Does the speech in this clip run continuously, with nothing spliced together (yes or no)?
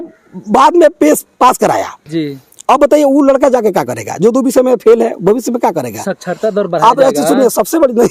yes